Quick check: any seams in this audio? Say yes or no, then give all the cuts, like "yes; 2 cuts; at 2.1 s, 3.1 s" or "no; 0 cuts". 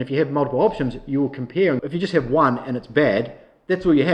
yes; 1 cut; at 1.8 s